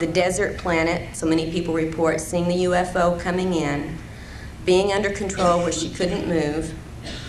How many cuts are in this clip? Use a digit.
1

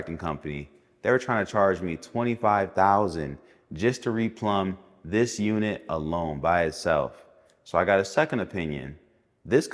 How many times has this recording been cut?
0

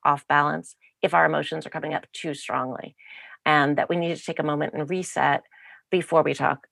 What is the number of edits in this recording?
0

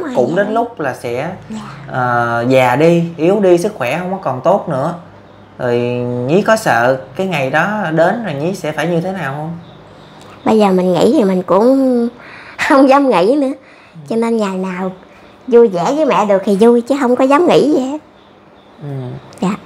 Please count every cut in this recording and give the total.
0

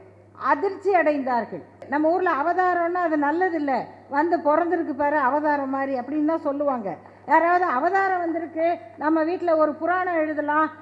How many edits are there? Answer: 1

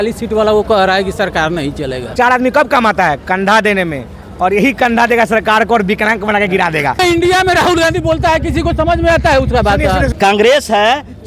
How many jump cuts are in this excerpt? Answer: 3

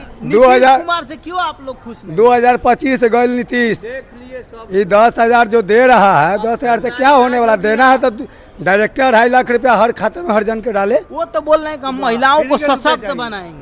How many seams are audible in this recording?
0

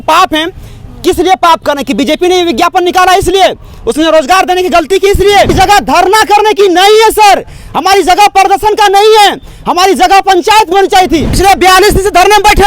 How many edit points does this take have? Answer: 2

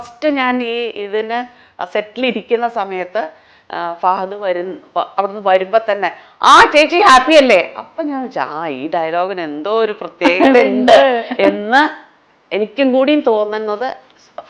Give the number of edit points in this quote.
0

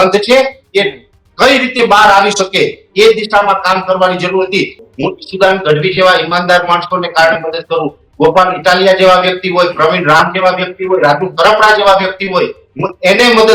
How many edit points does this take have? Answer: 1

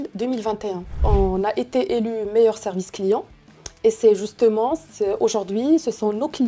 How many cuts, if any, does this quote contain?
1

